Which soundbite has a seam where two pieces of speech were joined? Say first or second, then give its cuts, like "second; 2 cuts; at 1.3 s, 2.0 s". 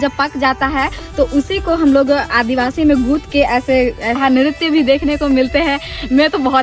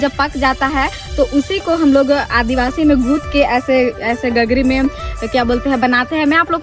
first; 1 cut; at 4.1 s